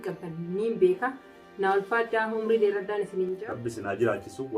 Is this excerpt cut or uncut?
cut